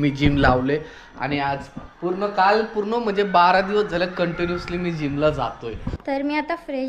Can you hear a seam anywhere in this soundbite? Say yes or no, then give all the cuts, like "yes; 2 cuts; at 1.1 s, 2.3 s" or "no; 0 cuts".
yes; 1 cut; at 5.9 s